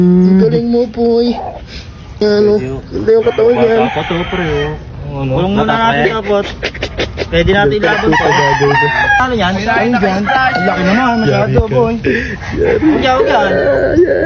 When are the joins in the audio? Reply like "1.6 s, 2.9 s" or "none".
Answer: 2.1 s, 9.2 s